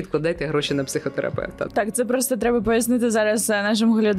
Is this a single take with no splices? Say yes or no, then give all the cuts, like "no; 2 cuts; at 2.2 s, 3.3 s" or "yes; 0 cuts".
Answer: no; 1 cut; at 1.6 s